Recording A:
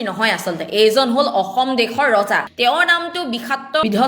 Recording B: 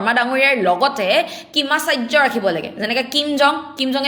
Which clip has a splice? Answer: A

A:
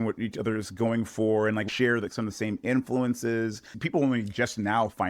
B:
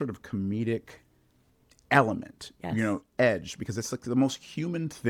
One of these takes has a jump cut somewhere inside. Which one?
A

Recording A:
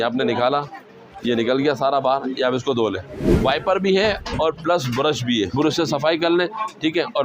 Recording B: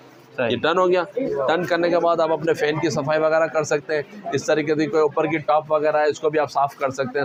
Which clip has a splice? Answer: A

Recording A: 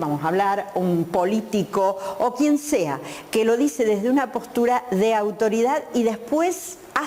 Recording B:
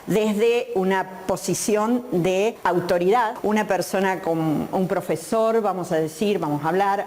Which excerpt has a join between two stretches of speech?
B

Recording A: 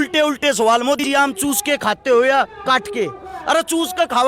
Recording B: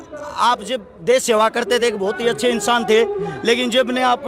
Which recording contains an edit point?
A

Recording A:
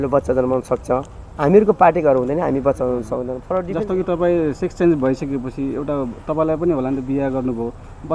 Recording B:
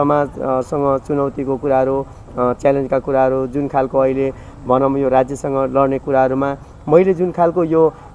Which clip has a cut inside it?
A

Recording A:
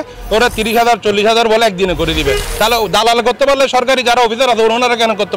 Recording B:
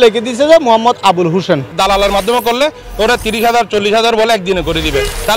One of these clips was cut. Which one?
B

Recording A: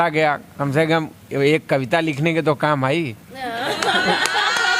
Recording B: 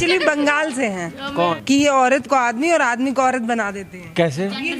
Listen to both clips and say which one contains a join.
B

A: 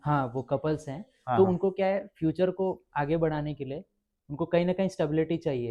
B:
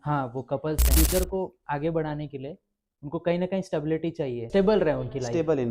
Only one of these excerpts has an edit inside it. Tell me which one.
B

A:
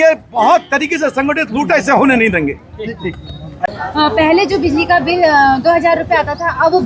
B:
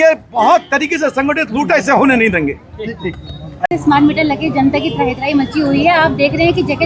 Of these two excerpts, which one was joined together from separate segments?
A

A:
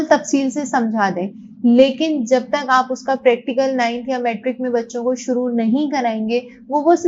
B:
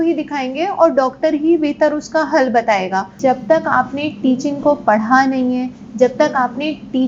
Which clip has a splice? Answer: B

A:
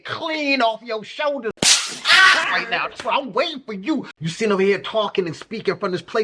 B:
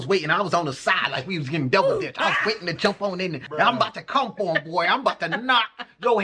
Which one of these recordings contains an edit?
A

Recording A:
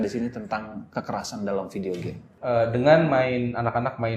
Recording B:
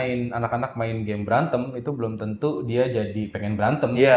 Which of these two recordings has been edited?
A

